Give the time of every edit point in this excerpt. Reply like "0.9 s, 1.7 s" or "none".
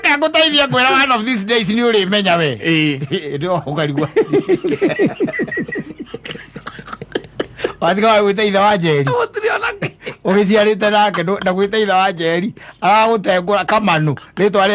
none